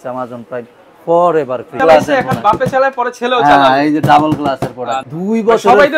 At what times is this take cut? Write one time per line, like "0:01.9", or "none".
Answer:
0:01.8
0:05.0